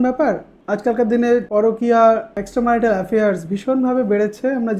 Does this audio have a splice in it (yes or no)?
yes